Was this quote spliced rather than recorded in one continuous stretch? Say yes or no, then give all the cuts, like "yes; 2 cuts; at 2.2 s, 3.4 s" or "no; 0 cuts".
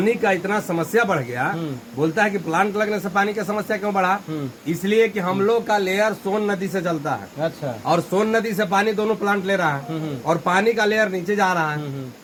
no; 0 cuts